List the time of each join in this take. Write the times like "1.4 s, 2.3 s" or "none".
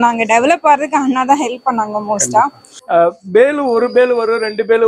2.7 s